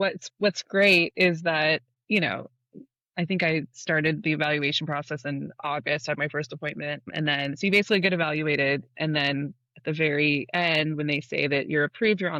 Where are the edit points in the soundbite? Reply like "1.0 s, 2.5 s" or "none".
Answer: none